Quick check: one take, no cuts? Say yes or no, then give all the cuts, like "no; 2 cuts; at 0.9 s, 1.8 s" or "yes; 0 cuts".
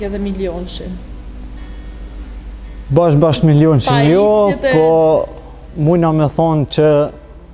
yes; 0 cuts